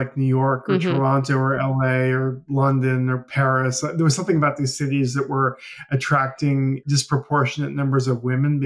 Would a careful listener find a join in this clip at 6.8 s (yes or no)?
yes